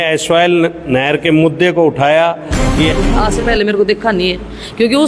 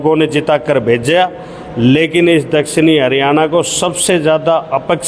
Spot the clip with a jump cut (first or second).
first